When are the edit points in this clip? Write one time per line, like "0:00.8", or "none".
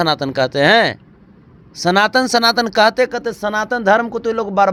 none